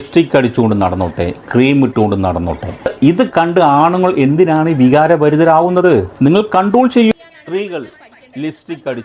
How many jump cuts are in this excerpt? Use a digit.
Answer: 0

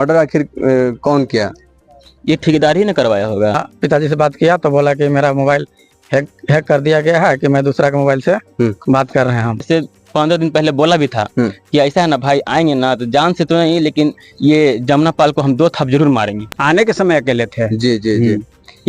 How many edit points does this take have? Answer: 3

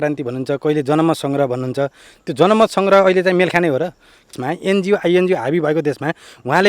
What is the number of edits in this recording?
1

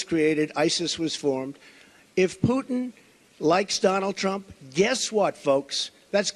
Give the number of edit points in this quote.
1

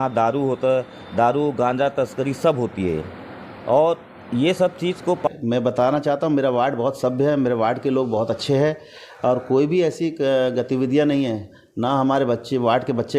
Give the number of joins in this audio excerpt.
1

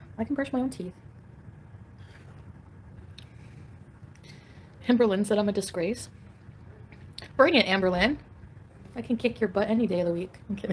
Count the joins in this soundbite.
1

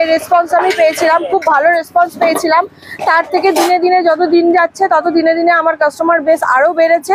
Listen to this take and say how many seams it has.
0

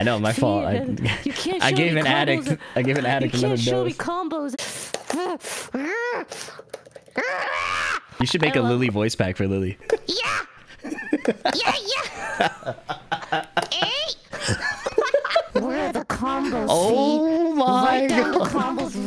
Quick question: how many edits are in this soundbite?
4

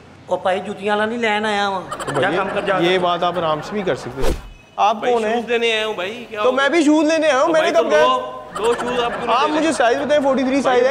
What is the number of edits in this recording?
1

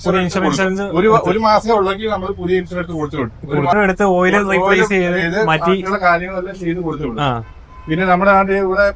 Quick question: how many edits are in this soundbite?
1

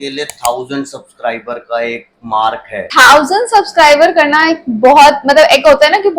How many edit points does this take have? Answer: 1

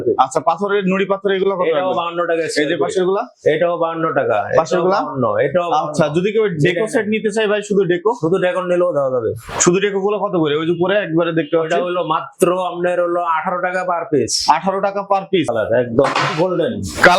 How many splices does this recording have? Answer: 1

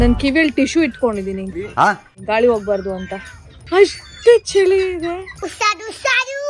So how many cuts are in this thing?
3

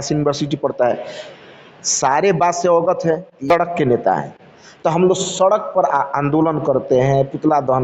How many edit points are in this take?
1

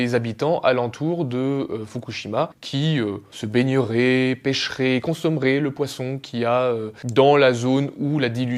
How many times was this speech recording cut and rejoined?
0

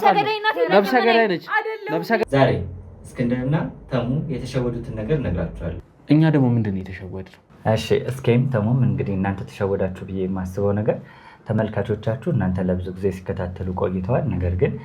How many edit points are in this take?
1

